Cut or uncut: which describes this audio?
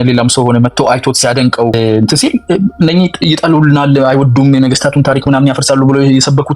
cut